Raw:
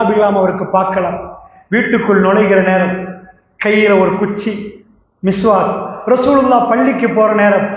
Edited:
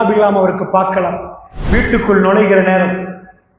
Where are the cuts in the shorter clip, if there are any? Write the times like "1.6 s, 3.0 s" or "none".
none